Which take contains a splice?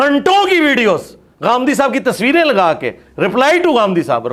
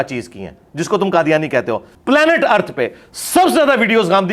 second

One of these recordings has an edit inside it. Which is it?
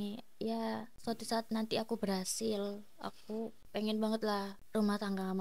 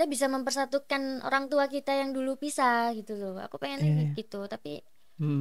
first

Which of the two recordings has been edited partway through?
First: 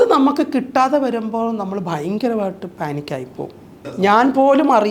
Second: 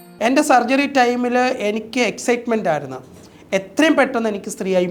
first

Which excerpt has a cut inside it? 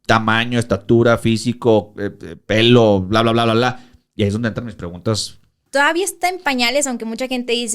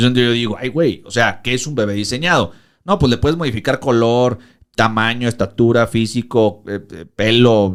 first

